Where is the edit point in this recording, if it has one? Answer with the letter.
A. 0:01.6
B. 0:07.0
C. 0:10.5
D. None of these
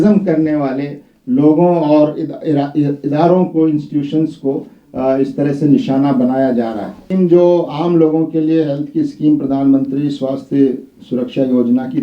B